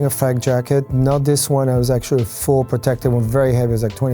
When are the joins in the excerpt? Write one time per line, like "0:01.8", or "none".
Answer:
none